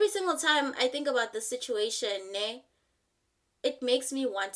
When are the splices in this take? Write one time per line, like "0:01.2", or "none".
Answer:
none